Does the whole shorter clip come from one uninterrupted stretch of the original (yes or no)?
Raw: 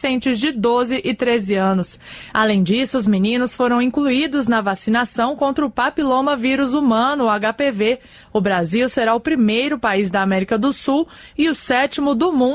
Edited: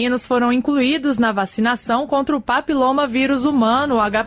yes